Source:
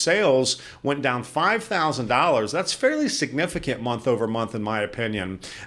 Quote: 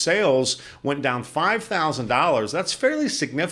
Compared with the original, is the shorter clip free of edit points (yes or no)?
yes